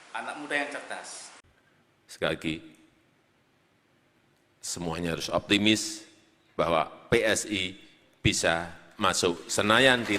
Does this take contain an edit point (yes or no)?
yes